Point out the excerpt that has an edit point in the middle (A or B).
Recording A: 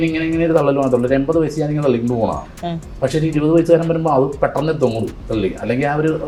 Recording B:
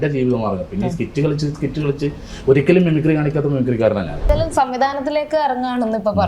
B